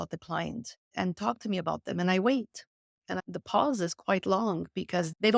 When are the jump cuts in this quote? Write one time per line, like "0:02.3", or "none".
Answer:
0:03.2